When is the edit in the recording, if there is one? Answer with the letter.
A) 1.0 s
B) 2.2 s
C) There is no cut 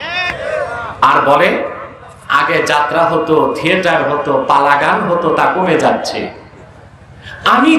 A